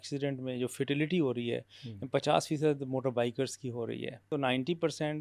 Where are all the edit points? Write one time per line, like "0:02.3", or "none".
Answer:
0:04.3